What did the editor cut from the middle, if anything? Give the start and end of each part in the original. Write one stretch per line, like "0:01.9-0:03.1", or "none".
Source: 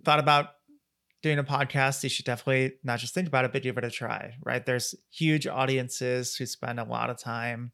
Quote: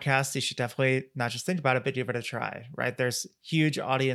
none